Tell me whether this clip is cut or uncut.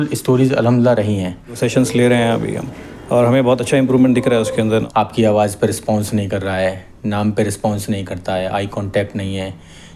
cut